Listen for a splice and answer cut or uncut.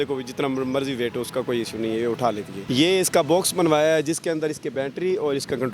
cut